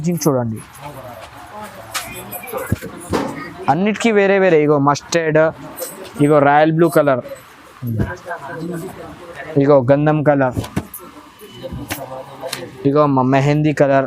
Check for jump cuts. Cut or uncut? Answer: uncut